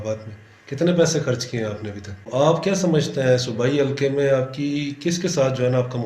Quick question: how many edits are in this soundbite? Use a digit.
1